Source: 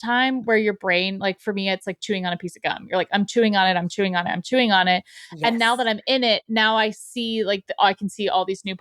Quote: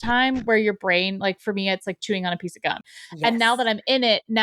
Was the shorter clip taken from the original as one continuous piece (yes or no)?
no